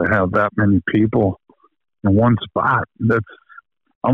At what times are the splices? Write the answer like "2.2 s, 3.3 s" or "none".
none